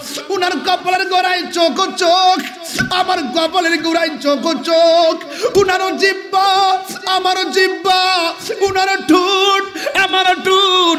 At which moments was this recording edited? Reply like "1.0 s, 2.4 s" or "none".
none